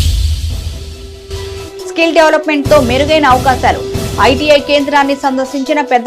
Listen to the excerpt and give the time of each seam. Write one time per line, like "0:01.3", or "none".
0:01.6

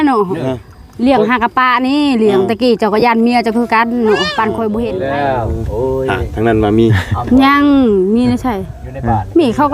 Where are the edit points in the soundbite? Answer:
0:04.9

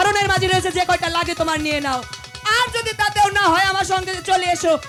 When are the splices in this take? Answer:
none

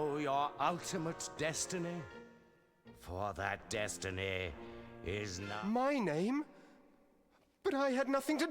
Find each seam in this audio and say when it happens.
0:05.5

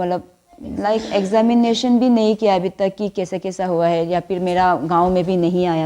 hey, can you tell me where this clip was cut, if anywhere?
none

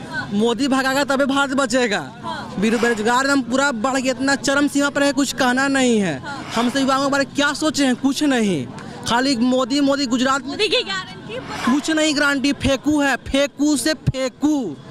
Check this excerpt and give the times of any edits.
none

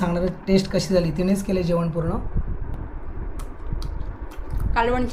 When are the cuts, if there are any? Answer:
none

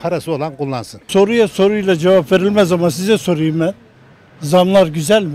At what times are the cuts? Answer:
0:00.9

